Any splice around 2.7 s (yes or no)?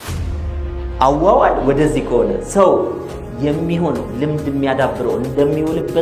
no